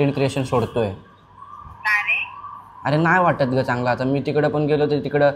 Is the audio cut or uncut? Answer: uncut